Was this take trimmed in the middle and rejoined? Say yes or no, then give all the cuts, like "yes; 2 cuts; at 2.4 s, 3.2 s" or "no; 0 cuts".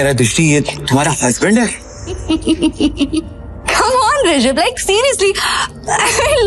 yes; 1 cut; at 2.2 s